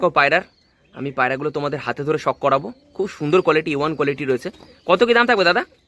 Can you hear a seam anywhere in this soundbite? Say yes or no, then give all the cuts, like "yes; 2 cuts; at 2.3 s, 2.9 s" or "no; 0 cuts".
no; 0 cuts